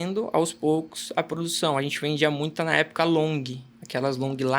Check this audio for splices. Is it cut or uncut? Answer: uncut